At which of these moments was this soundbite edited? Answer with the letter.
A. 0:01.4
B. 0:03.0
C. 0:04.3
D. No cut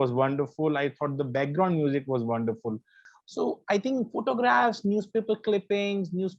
B